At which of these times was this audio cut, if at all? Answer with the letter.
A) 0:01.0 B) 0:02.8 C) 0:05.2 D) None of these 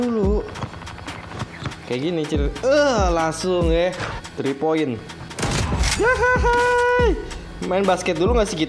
C